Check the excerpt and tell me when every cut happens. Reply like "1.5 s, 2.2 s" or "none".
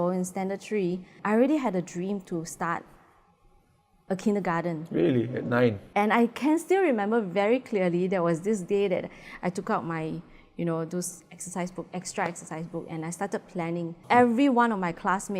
1.1 s, 5.8 s, 14.0 s